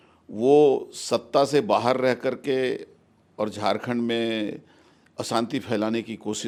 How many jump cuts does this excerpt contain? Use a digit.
0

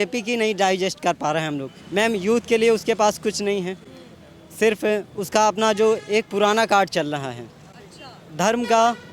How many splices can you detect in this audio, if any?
1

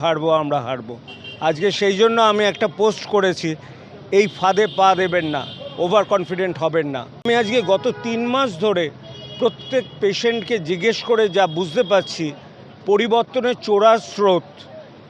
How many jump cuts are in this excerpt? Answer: 1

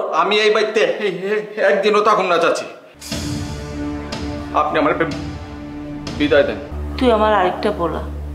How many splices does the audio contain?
1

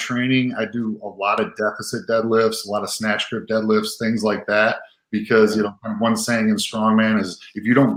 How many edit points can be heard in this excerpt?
0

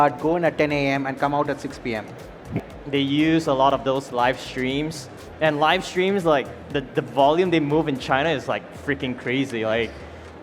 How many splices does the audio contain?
1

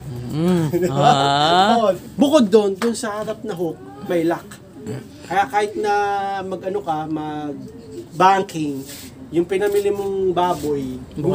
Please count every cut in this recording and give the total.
1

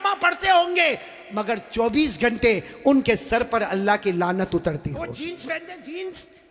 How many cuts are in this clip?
1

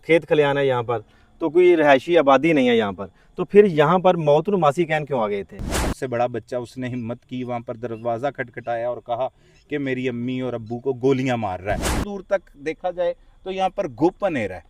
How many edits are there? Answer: 2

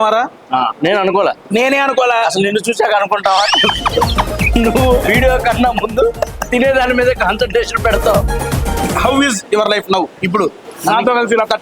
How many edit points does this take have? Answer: 3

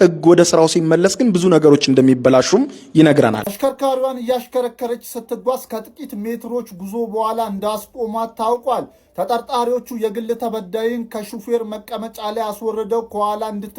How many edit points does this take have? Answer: 1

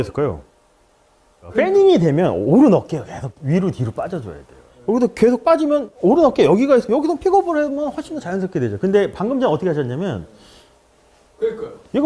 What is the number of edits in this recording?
0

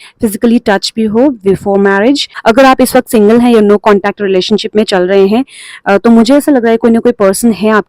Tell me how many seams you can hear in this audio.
1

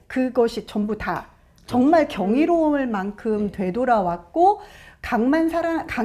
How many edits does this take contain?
0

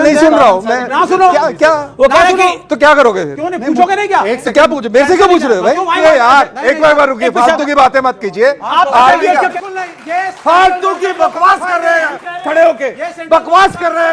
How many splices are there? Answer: 2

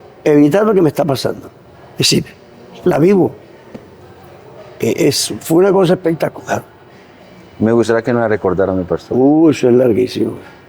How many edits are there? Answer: 0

